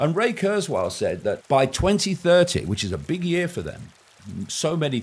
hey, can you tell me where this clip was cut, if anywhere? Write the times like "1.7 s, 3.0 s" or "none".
1.4 s